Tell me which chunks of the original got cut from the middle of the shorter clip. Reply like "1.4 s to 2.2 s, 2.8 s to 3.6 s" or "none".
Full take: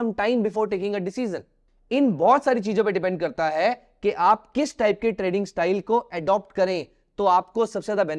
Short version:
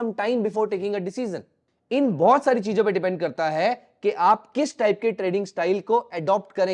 none